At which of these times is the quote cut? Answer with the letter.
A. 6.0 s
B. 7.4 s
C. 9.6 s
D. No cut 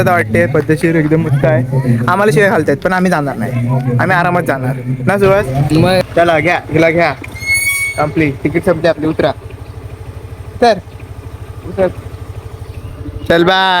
A